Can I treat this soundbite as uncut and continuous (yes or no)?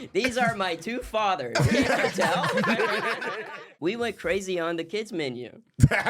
no